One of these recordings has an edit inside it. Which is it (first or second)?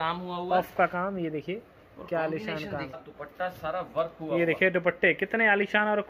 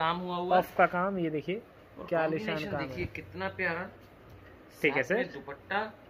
first